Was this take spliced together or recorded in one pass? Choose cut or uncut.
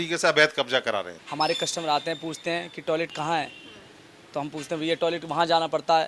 cut